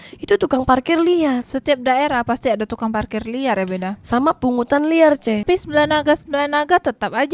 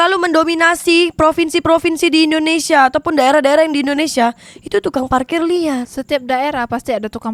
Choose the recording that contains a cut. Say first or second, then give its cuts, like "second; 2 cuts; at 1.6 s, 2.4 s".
first; 1 cut; at 5.4 s